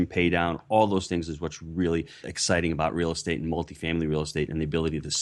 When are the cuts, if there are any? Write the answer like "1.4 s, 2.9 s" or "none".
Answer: 2.3 s